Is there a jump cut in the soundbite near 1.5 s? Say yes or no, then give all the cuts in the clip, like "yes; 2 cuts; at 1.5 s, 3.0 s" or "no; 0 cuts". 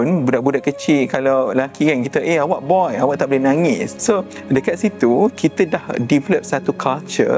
no; 1 cut; at 3.9 s